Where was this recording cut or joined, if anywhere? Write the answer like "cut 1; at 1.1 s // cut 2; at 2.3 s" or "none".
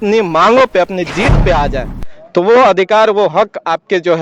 none

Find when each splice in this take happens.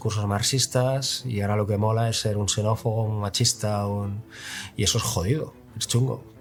none

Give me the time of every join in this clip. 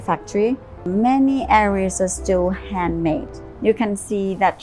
cut 1; at 0.9 s // cut 2; at 3.5 s

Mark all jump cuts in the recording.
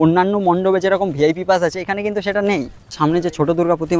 cut 1; at 3.0 s

